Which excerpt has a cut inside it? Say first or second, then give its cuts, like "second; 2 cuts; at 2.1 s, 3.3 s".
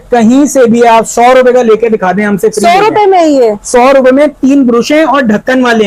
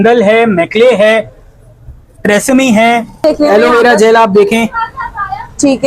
second; 1 cut; at 3.2 s